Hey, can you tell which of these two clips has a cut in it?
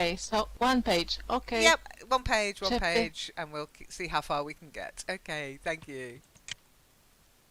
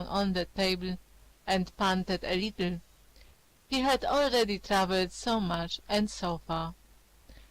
second; 1 cut; at 3.9 s

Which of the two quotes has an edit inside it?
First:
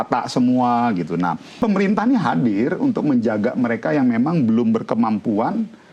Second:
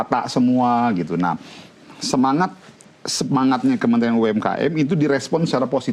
first; 1 cut; at 1.6 s

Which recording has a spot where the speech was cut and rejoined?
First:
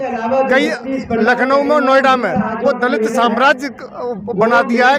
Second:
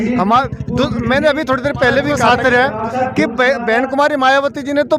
second; 1 cut; at 2.1 s

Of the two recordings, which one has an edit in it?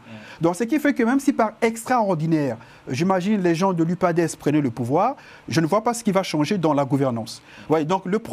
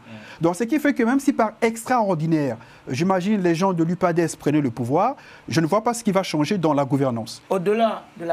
second; 1 cut; at 7.3 s

